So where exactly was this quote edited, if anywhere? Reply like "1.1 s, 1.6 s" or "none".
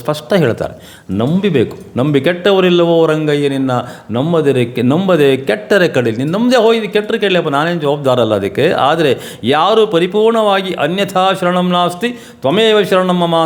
none